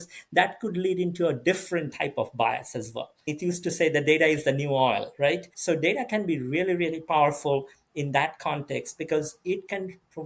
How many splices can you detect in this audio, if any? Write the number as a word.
two